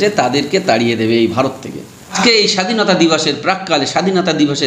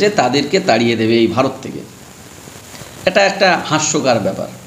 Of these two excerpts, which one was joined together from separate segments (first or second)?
first